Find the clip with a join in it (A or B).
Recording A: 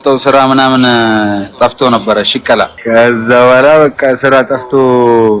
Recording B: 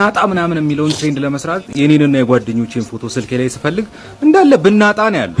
A